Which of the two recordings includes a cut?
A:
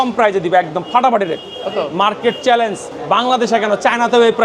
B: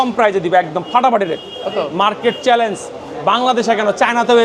A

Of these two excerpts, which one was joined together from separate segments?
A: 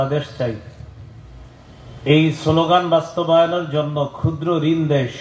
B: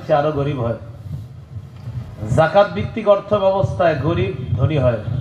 B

